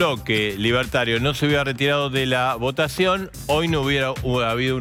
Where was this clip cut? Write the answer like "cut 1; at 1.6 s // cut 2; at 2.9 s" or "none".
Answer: none